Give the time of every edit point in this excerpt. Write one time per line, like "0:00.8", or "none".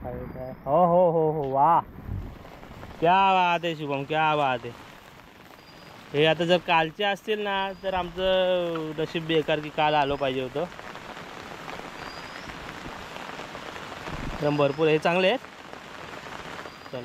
none